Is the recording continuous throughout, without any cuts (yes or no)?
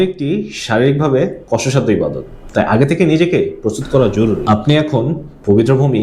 no